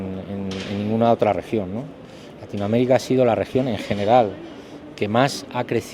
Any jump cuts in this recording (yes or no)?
no